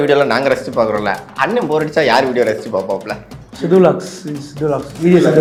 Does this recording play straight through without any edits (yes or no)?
yes